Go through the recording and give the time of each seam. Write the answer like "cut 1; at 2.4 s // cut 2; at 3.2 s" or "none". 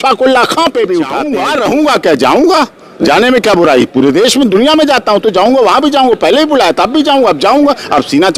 cut 1; at 1.4 s